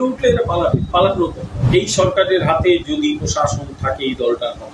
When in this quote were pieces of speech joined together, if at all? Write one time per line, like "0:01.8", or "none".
0:01.7